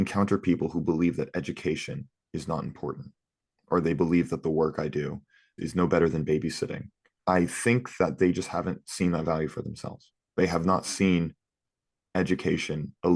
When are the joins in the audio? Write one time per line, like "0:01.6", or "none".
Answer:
none